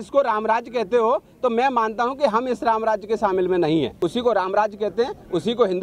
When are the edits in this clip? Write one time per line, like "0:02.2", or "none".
0:03.9